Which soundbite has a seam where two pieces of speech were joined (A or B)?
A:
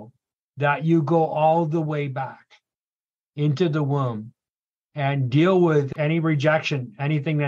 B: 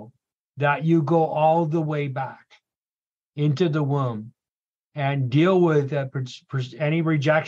A